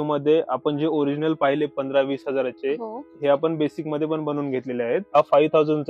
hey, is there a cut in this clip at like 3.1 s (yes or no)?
yes